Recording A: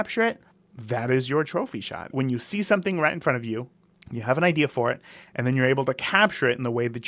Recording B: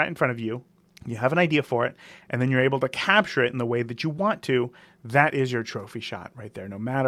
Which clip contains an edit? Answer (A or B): A